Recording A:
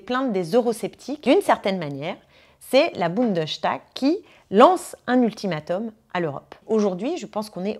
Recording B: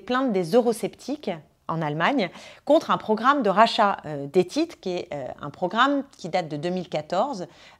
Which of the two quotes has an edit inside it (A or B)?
A